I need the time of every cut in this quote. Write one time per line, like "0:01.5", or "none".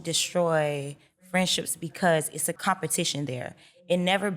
0:02.6